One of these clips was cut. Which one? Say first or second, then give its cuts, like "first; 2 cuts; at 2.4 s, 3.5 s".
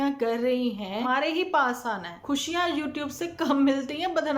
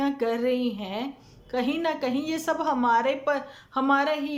first; 2 cuts; at 1.0 s, 2.2 s